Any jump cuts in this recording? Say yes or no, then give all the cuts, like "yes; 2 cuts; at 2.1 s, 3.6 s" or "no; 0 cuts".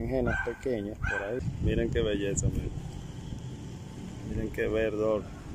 yes; 1 cut; at 1.4 s